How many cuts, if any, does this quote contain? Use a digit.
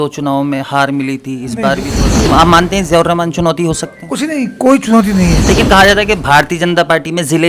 2